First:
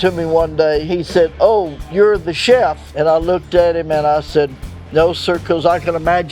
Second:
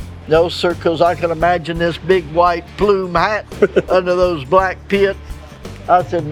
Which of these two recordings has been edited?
first; 2 cuts; at 0.9 s, 2.9 s

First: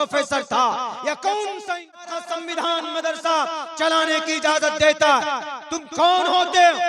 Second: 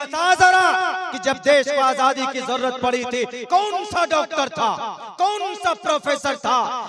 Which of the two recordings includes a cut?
first; 1 cut; at 2.1 s

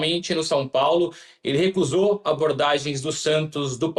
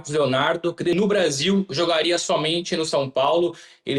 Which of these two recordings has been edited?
second; 1 cut; at 0.9 s

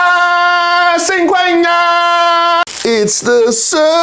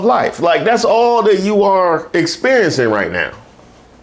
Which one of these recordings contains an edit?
first; 1 cut; at 2.7 s

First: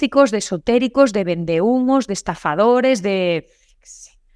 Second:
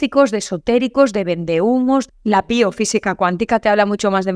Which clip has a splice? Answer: second; 1 cut; at 2.1 s

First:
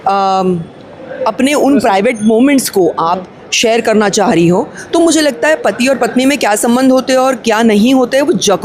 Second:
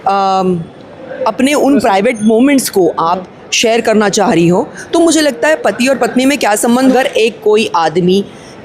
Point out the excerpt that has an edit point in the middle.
second; 1 cut; at 6.9 s

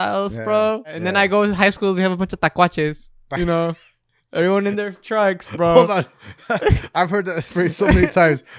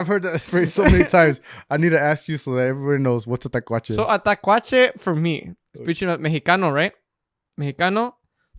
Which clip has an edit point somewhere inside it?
first; 1 cut; at 1.0 s

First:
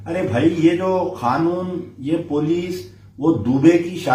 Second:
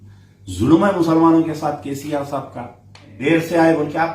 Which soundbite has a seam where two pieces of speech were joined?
second; 1 cut; at 3.2 s

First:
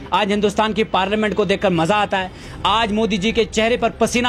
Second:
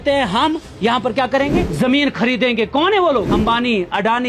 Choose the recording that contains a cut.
second; 2 cuts; at 1.6 s, 3.3 s

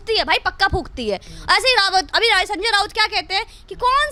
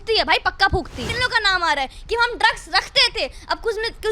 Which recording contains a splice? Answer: second; 1 cut; at 1.1 s

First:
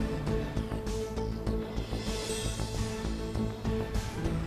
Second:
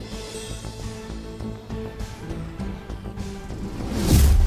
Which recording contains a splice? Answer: first; 1 cut; at 1.0 s

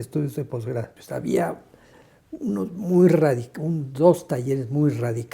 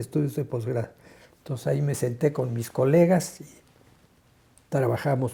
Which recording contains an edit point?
first; 1 cut; at 1.0 s

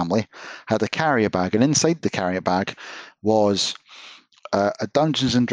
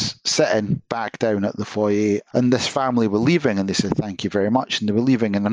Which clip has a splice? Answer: second; 1 cut; at 2.2 s

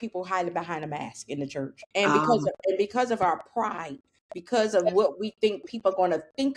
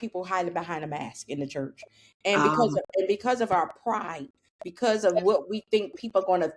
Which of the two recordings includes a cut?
first; 1 cut; at 1.8 s

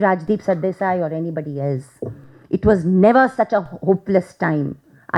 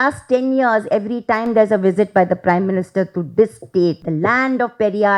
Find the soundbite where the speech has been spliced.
second; 1 cut; at 4.0 s

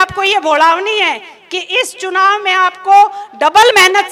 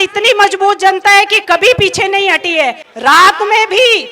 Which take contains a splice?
second; 1 cut; at 2.8 s

